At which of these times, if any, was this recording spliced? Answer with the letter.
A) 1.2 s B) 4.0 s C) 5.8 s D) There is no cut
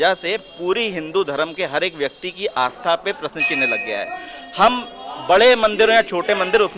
D